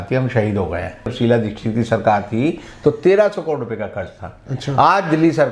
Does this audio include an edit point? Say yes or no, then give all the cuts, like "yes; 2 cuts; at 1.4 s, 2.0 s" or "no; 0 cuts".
yes; 1 cut; at 1.1 s